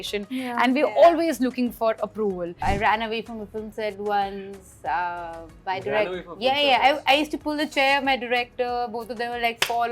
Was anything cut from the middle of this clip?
yes; 1 cut; at 2.6 s

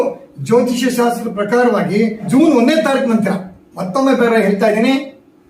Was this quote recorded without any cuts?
no; 1 cut; at 2.3 s

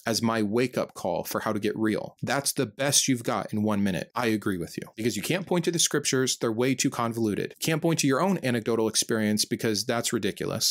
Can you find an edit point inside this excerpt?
no; 0 cuts

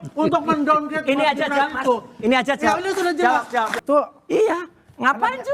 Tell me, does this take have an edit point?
yes; 1 cut; at 3.7 s

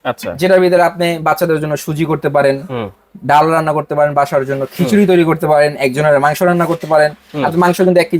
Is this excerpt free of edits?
yes; 0 cuts

